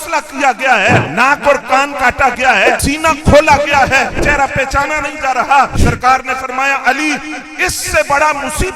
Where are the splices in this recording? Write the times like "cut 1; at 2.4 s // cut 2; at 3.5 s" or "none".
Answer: cut 1; at 1.1 s // cut 2; at 2.8 s // cut 3; at 4.2 s // cut 4; at 5.7 s